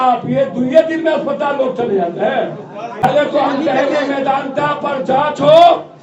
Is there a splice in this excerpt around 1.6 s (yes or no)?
no